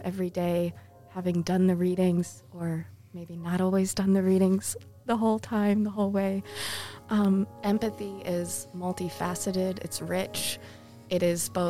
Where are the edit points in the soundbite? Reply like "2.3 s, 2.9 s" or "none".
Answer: 7.5 s